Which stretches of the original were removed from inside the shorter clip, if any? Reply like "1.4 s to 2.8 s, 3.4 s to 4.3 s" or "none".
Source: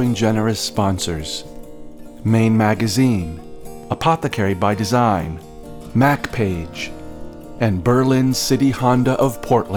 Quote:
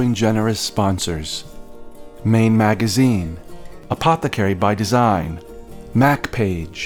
none

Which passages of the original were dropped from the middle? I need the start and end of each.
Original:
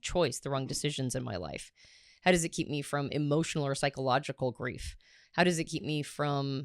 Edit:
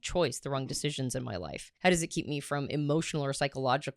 1.6 s to 2.0 s

